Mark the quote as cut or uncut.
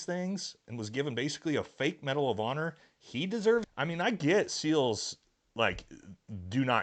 cut